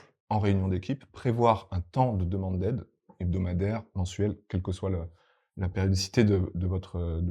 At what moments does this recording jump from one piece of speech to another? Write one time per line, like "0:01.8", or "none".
0:03.1